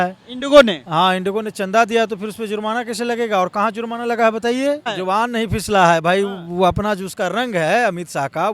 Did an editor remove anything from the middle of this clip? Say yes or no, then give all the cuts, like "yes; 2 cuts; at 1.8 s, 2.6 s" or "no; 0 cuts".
yes; 1 cut; at 5.0 s